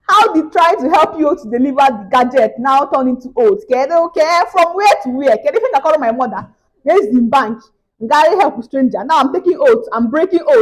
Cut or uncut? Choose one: uncut